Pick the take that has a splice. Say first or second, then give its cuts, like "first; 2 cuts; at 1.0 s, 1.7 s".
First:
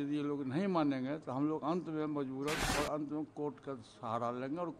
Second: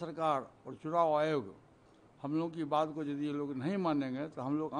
first; 1 cut; at 2.7 s